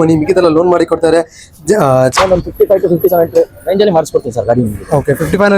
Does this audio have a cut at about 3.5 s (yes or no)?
no